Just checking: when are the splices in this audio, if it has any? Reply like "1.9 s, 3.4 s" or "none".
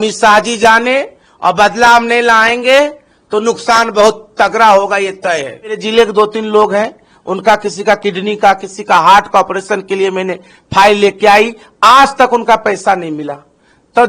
5.8 s

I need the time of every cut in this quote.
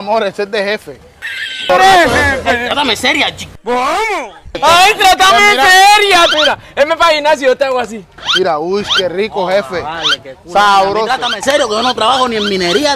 1.7 s, 6.3 s

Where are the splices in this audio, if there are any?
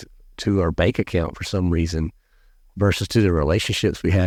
none

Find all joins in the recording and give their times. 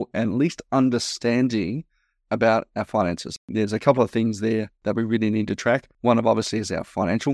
3.5 s, 4.7 s, 5.9 s

